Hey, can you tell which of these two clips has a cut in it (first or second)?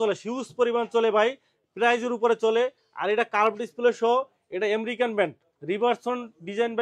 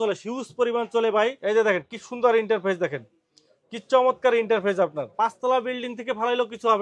second